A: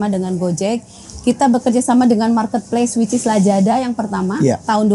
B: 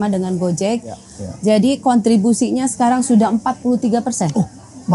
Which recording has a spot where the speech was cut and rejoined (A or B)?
B